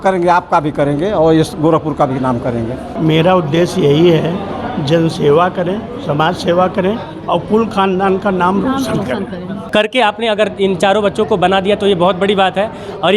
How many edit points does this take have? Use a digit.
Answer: 2